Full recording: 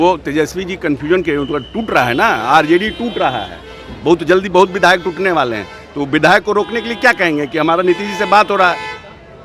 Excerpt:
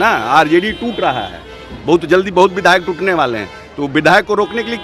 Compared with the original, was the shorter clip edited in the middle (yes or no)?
no